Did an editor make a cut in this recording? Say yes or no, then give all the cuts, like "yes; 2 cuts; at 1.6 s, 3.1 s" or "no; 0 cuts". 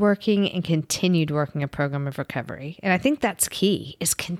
no; 0 cuts